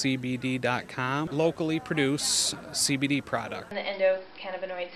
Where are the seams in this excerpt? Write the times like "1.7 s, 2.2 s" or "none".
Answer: 1.3 s, 3.7 s